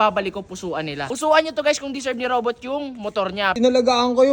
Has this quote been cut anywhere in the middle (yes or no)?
yes